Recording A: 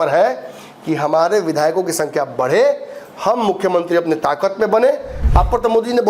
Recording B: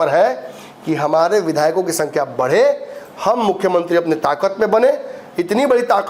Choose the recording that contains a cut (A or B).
A